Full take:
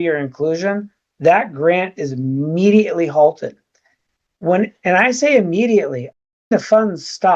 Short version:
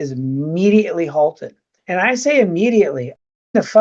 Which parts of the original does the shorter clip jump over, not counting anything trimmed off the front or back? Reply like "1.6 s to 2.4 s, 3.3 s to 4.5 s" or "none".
3.8 s to 4.8 s

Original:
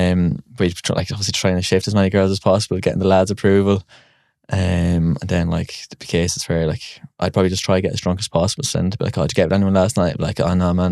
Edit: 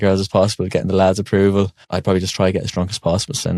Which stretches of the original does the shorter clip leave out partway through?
3.9 s to 7.1 s

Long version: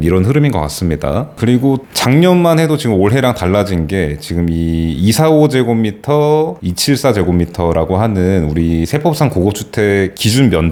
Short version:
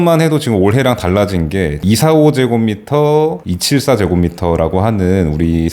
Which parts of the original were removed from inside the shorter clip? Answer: 4.2 s to 5.0 s

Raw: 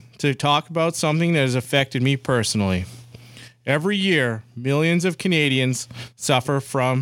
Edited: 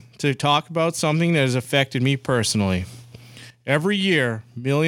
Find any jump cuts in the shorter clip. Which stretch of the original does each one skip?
none

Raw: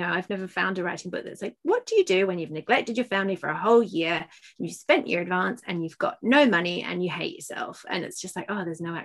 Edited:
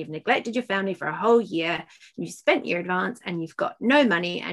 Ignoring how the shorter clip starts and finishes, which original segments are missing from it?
none

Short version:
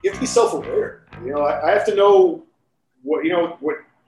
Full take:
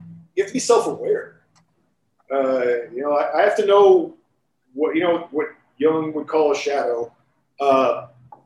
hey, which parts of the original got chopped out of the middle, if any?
1.5 s to 2.9 s

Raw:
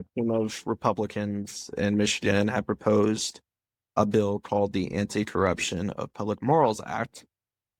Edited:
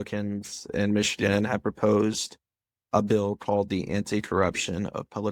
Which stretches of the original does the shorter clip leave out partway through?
none

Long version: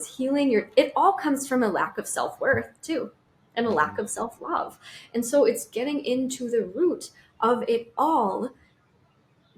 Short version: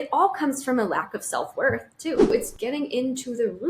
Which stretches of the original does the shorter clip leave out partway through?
3.2 s to 5.5 s

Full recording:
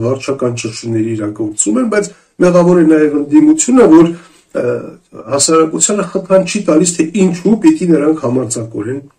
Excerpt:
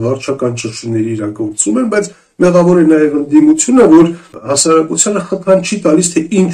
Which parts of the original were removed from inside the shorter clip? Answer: 4.3 s to 5.1 s

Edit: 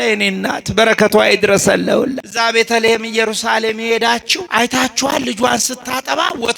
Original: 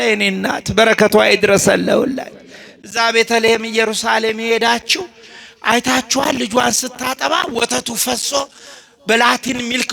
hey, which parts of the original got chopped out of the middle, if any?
2.2 s to 2.8 s, 5.0 s to 5.5 s

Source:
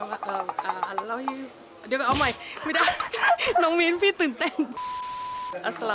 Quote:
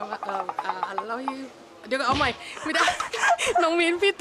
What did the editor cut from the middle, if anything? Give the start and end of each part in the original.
none

